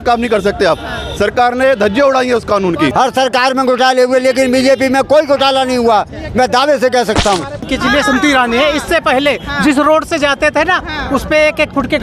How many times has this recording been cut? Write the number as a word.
two